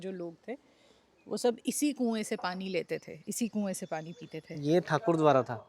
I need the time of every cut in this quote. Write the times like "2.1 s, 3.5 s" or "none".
4.5 s